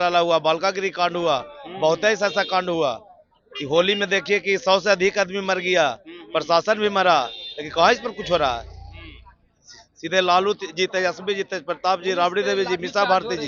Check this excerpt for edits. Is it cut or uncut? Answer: uncut